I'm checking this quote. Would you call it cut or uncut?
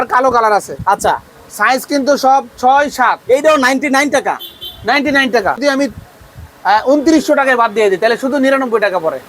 cut